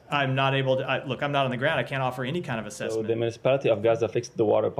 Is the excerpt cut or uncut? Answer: cut